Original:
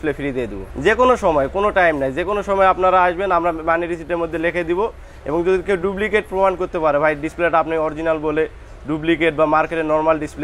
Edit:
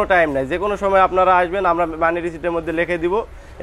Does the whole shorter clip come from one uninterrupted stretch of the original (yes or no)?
yes